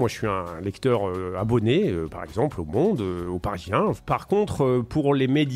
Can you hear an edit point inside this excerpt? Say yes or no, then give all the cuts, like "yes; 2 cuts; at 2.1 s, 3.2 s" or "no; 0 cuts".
yes; 1 cut; at 4.0 s